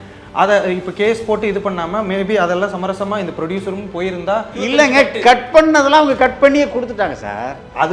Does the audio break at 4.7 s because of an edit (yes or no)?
yes